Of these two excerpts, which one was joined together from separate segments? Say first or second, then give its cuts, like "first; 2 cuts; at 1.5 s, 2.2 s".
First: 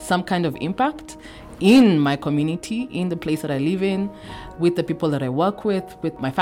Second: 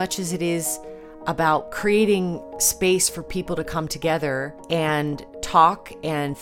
second; 3 cuts; at 2.6 s, 4.6 s, 5.3 s